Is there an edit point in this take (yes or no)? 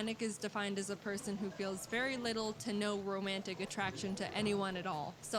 yes